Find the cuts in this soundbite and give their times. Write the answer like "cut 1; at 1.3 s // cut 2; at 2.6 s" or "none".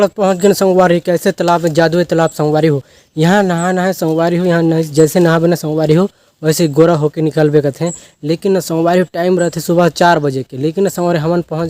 none